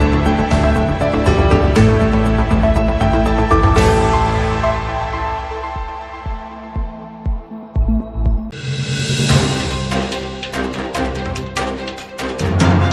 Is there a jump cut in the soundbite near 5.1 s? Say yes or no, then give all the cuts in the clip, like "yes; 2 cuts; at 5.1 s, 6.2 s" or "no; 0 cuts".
no; 1 cut; at 8.6 s